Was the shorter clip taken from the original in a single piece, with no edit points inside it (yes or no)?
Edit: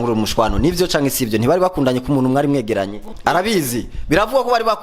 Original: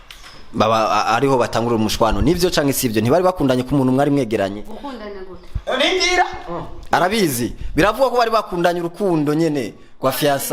no